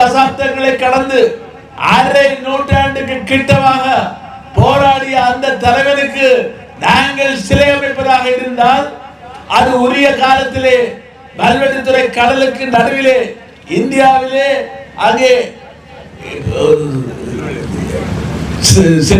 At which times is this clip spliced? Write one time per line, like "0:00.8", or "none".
none